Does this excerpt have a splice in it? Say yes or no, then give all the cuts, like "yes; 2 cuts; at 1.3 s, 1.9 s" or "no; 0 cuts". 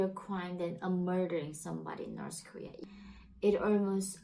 yes; 1 cut; at 2.7 s